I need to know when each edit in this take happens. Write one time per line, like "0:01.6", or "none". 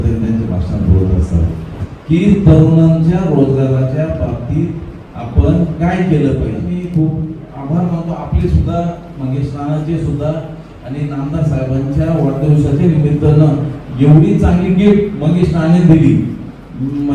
0:01.8
0:06.7